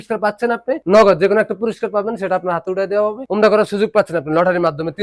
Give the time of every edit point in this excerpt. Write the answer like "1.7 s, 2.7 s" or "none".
0.8 s, 3.2 s